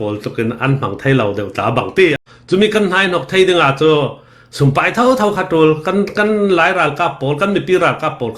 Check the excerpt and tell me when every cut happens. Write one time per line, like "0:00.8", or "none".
0:02.2